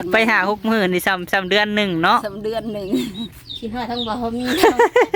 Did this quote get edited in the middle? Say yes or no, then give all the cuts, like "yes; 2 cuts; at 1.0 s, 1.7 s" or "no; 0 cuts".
yes; 1 cut; at 3.3 s